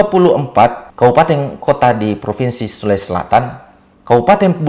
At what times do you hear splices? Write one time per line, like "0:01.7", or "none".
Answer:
0:00.8
0:01.5

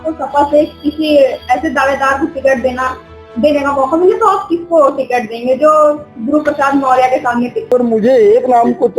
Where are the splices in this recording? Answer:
0:07.7

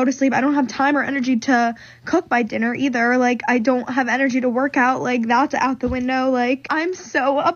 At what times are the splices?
0:06.7

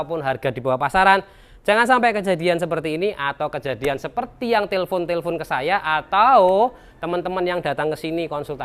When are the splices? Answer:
none

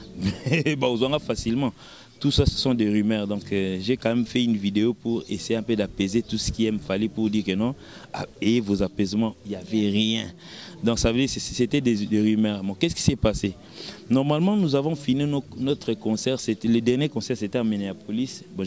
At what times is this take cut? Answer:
none

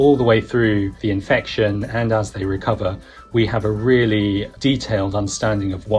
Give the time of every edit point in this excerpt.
0:01.0

